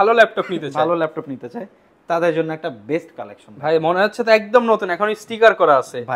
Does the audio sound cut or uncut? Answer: uncut